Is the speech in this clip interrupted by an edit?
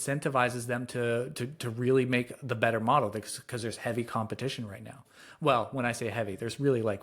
no; 0 cuts

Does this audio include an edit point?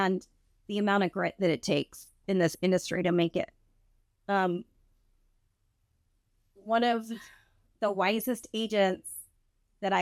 no; 0 cuts

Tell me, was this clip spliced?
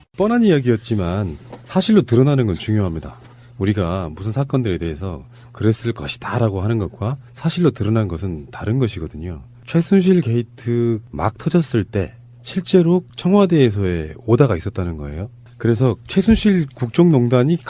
no; 0 cuts

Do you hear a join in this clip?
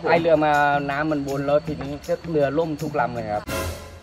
no; 0 cuts

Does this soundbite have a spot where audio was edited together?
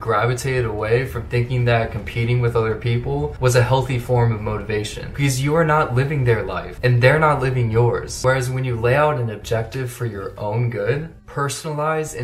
yes; 4 cuts; at 3.3 s, 4.7 s, 6.6 s, 8.1 s

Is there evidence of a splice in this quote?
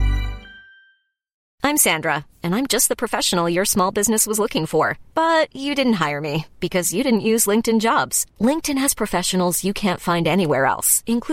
yes; 1 cut; at 1.5 s

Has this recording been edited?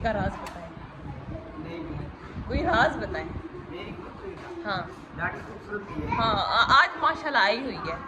no; 0 cuts

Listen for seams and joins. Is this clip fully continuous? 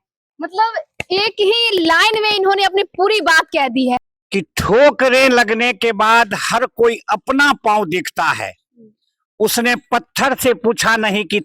no; 1 cut; at 4.0 s

